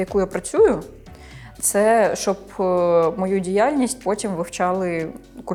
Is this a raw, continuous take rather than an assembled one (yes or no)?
yes